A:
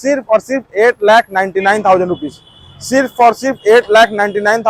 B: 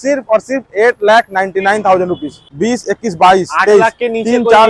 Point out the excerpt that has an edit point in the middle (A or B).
B